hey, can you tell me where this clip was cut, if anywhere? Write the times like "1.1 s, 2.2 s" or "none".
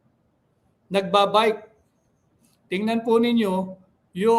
none